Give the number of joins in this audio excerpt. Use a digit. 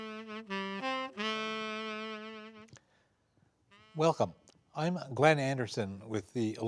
0